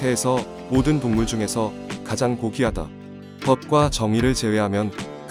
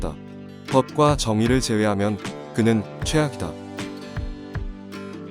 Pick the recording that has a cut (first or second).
second